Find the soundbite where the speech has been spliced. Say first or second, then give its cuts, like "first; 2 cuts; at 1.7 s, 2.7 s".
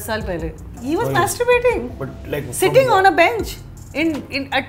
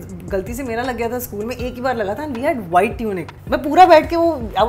second; 1 cut; at 3.3 s